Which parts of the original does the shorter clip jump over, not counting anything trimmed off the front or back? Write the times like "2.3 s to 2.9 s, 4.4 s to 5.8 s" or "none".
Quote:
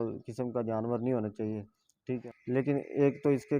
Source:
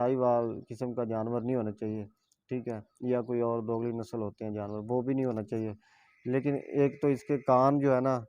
2.7 s to 6.1 s